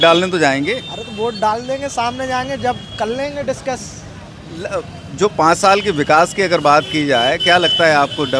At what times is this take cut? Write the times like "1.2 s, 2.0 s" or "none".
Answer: none